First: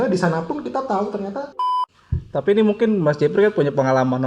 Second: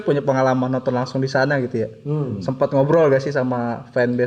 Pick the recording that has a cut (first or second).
first